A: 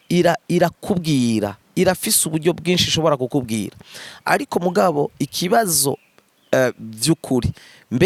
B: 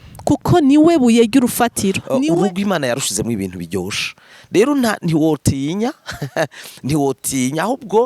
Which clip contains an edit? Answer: B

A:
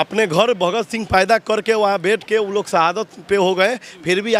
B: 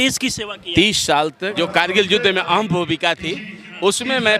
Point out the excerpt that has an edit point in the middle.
B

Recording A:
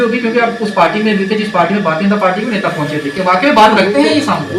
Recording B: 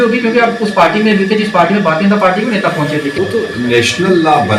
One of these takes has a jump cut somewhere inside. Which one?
B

